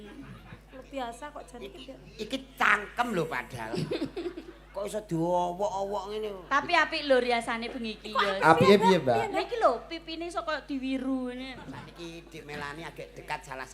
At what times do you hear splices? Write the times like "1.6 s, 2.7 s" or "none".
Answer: 11.9 s